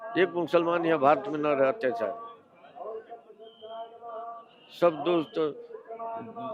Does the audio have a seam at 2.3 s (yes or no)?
no